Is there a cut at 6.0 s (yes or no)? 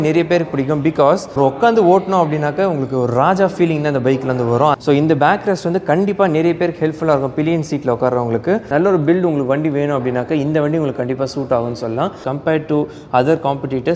no